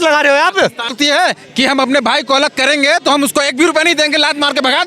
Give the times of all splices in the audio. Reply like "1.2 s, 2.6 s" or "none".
0.9 s